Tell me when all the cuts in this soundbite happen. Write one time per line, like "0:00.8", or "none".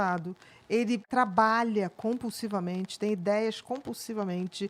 0:01.1